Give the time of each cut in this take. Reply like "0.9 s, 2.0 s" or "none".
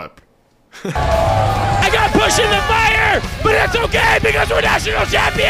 0.9 s

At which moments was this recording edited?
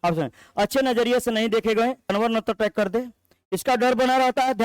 2.1 s

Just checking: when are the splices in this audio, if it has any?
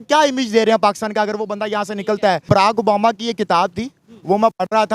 2.5 s

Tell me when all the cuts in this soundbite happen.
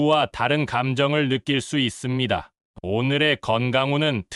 2.6 s

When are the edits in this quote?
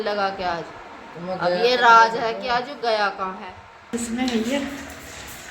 3.9 s

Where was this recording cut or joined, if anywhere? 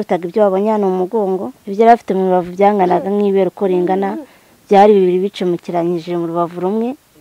1.6 s

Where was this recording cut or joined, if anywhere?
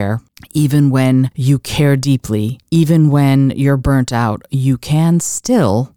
1.4 s, 2.6 s

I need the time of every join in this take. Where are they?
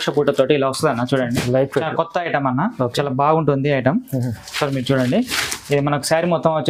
none

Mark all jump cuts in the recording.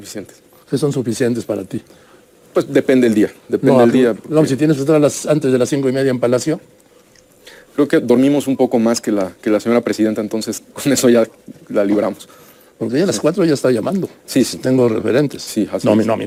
none

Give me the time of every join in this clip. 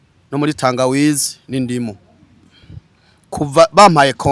none

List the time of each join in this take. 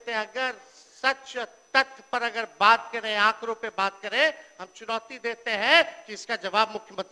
none

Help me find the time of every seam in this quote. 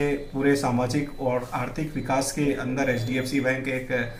none

